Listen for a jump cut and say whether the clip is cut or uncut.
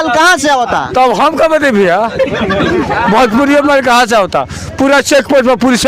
uncut